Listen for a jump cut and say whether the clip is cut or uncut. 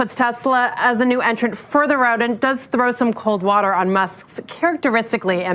uncut